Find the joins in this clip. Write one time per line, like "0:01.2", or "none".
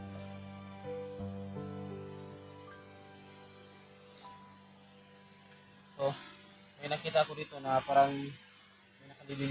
none